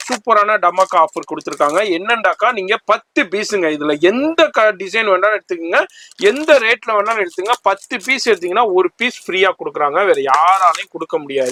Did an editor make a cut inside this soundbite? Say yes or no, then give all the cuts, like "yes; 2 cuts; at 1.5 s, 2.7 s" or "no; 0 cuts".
no; 0 cuts